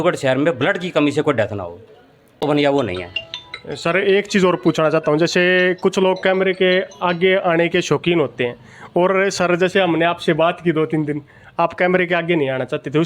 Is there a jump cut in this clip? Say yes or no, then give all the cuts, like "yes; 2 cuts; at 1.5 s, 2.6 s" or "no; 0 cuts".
yes; 1 cut; at 2.4 s